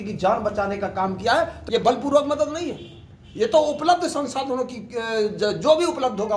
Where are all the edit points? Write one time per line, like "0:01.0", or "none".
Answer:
0:01.6

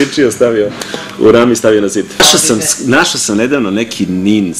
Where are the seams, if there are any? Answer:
0:02.2

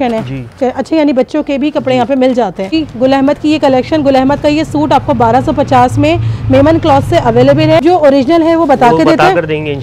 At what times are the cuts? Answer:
0:02.7
0:07.8

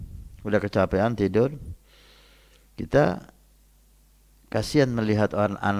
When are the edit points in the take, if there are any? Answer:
none

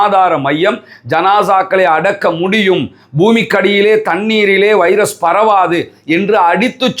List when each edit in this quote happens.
none

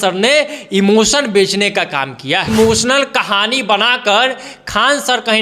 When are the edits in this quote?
0:02.5

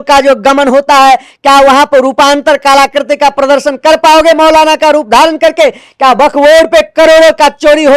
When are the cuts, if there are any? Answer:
none

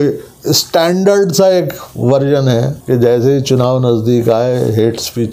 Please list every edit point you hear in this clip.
none

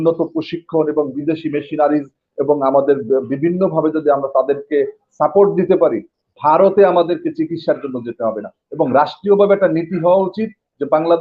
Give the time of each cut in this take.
none

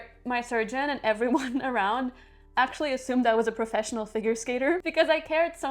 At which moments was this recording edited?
0:04.8

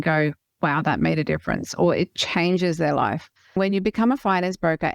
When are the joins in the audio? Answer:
0:03.5

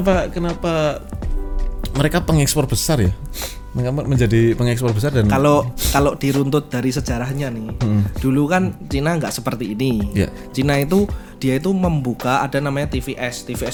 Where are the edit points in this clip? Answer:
none

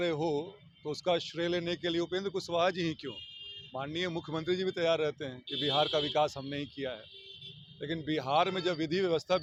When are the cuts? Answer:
none

